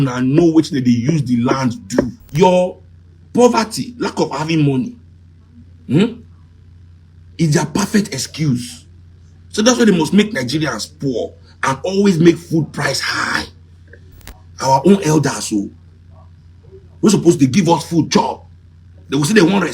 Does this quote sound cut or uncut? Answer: cut